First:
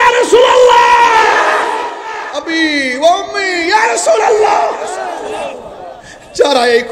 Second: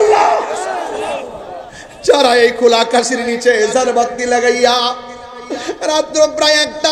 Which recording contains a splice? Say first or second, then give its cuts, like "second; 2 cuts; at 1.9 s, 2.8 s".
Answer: first; 1 cut; at 1.8 s